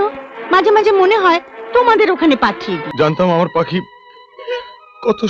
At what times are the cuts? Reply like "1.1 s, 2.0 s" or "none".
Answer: 2.9 s